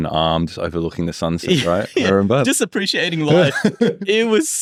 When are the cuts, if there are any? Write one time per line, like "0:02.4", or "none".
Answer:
none